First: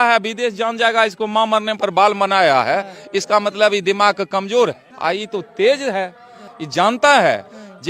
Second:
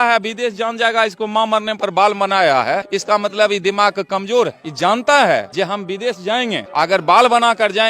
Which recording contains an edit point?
second; 4 cuts; at 2.9 s, 4.6 s, 5.5 s, 6.6 s

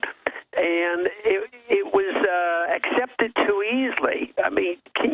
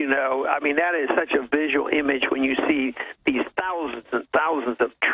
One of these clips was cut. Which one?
second; 1 cut; at 2.7 s

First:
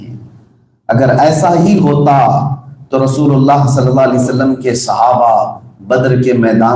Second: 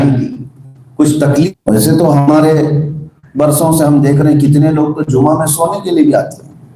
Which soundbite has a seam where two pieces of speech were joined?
second; 1 cut; at 1.3 s

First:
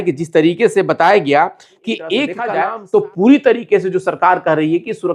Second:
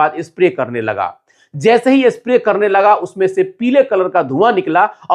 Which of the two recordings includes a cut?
first; 1 cut; at 2.5 s

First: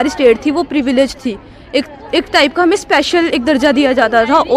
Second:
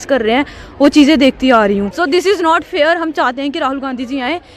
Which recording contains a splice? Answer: second; 1 cut; at 1.9 s

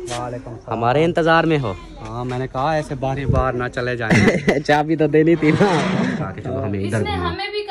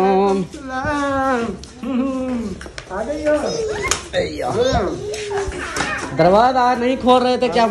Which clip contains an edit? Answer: first; 1 cut; at 6.4 s

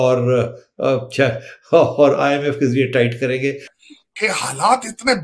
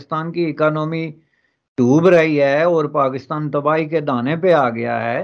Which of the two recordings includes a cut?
first; 1 cut; at 3.7 s

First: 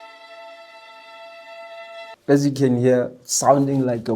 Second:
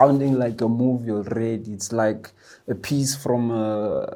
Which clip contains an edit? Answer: first; 1 cut; at 2.1 s

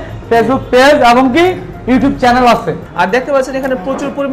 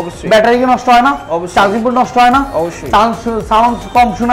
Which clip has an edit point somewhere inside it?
first; 1 cut; at 2.8 s

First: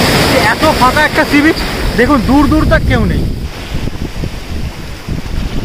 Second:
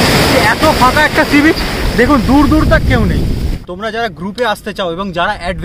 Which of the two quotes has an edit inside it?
second; 1 cut; at 3.6 s

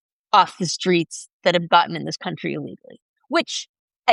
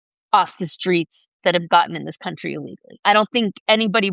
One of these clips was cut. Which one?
second; 1 cut; at 3.0 s

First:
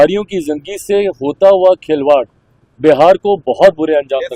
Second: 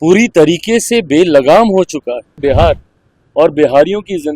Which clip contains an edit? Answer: second; 1 cut; at 2.4 s

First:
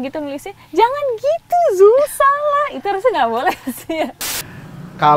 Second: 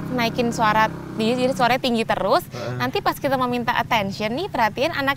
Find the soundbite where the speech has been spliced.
first; 1 cut; at 4.2 s

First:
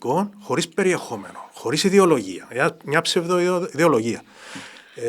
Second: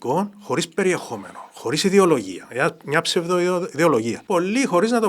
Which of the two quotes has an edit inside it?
second; 1 cut; at 4.2 s

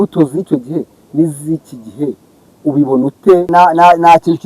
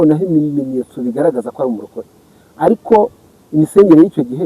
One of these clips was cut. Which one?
first; 1 cut; at 3.5 s

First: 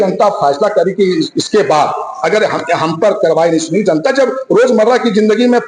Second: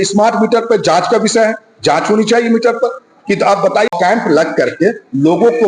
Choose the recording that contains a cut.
second; 1 cut; at 3.9 s

